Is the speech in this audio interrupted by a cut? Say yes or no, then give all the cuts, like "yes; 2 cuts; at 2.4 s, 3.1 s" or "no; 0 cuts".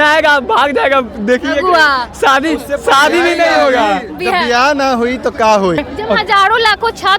yes; 1 cut; at 5.8 s